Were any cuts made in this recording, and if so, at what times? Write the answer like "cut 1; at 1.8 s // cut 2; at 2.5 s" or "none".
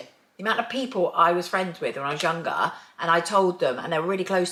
none